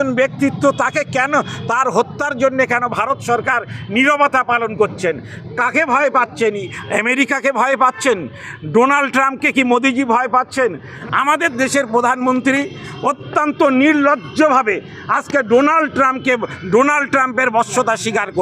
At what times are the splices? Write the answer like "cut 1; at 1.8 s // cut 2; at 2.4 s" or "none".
cut 1; at 10.9 s